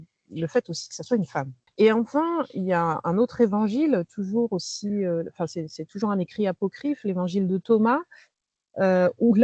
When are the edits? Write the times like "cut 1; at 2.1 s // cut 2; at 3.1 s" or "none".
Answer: cut 1; at 1.6 s